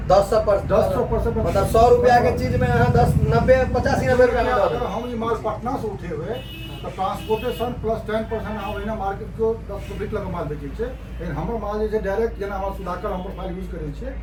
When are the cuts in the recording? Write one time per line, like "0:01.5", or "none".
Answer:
none